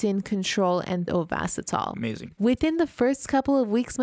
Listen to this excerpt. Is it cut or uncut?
cut